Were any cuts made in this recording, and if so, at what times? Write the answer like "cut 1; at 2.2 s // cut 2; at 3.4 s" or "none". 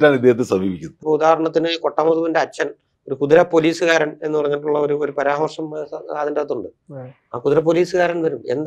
cut 1; at 0.9 s

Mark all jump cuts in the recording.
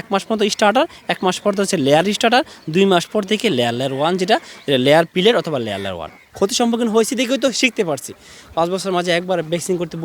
cut 1; at 6.2 s

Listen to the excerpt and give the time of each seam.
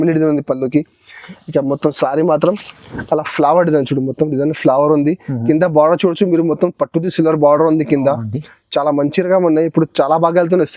none

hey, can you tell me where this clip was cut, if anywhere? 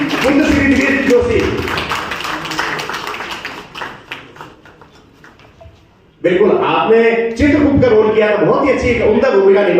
none

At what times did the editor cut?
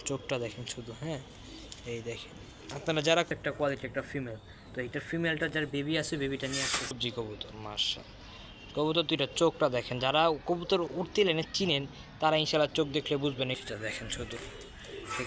cut 1; at 3.3 s // cut 2; at 7.0 s // cut 3; at 13.6 s

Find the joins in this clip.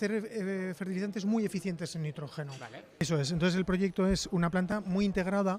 cut 1; at 3.0 s

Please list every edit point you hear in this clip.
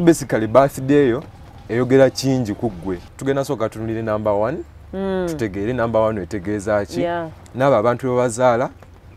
cut 1; at 3.0 s

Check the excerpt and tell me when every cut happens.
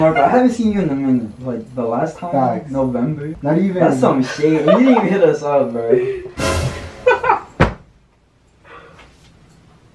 cut 1; at 3.3 s

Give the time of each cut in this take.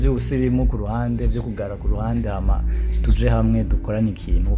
none

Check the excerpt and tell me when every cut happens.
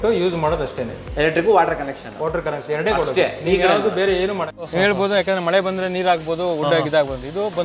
cut 1; at 4.5 s

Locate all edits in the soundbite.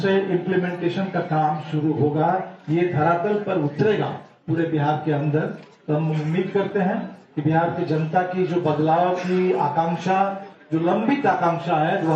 cut 1; at 3.9 s

